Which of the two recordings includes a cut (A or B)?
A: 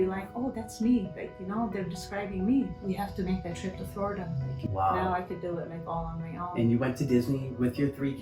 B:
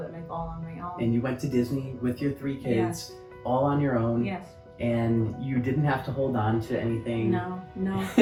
A